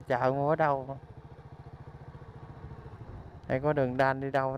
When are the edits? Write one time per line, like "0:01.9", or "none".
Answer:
none